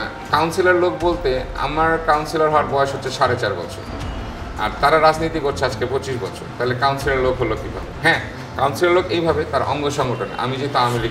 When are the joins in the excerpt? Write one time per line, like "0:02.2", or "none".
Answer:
none